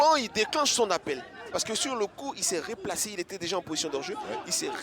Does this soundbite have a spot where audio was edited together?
yes; 1 cut; at 1.5 s

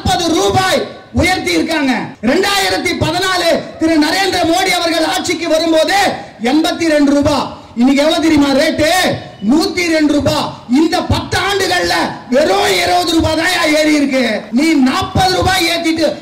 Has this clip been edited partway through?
no; 0 cuts

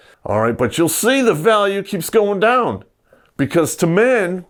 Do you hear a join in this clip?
no; 0 cuts

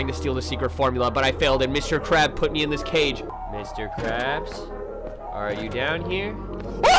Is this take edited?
yes; 1 cut; at 3.3 s

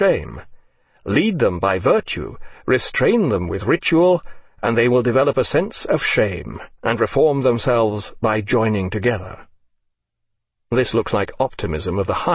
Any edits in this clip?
no; 0 cuts

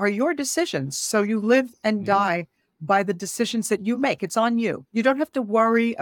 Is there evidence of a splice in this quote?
yes; 1 cut; at 4.8 s

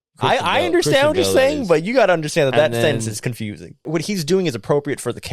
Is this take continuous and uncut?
no; 1 cut; at 3.9 s

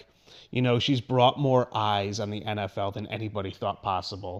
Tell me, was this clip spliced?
no; 0 cuts

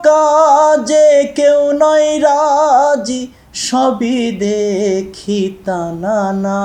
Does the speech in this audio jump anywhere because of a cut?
no; 0 cuts

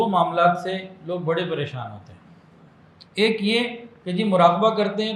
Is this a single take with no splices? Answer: yes; 0 cuts

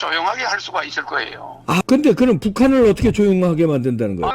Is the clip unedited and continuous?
no; 1 cut; at 1.8 s

